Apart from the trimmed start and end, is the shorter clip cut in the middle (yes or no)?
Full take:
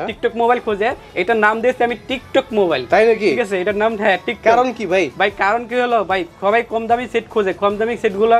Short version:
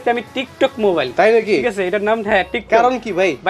no